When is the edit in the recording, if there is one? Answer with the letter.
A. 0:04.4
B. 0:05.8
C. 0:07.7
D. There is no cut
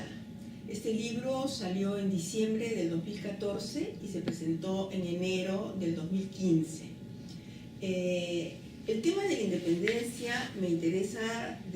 B